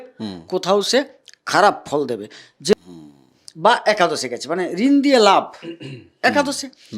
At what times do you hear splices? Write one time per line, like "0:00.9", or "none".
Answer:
0:02.7